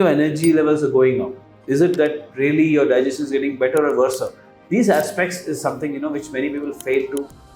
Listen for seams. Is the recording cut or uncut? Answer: uncut